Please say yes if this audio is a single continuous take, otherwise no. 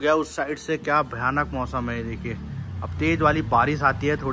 yes